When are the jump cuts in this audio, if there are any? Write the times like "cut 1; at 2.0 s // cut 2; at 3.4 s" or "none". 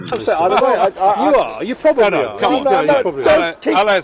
cut 1; at 0.9 s